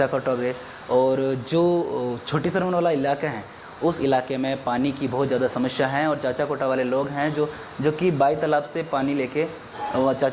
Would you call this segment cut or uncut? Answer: uncut